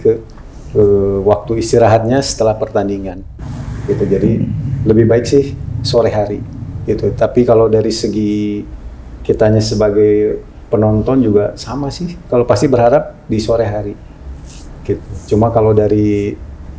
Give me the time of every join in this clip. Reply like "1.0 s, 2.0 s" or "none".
none